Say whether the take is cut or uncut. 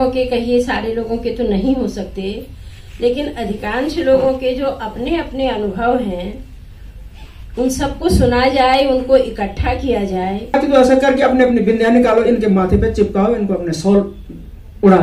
cut